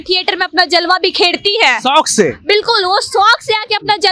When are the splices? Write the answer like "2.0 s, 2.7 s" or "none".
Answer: none